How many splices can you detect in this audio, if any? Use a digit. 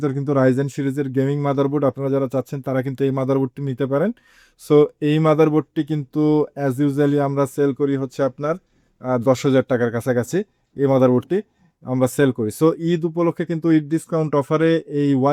0